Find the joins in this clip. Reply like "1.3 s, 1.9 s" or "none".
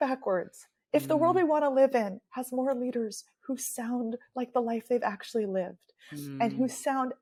none